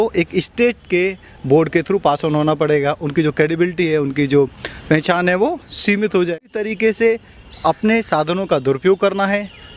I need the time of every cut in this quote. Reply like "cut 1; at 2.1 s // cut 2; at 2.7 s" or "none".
cut 1; at 6.7 s